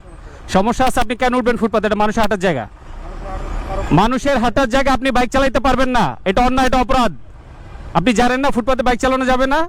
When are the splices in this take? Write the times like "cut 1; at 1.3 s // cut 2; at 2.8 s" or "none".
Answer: none